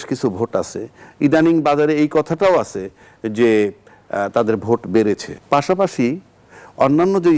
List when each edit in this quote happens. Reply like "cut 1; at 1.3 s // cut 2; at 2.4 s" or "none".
cut 1; at 5.3 s